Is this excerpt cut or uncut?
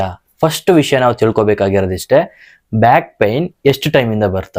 uncut